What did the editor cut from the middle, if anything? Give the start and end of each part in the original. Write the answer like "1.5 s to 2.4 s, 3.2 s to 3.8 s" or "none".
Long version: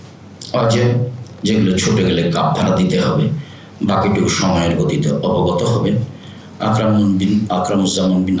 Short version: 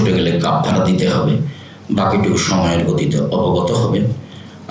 none